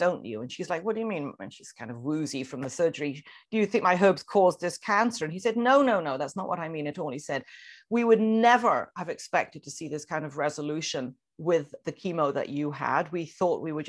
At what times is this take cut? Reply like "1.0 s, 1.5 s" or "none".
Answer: none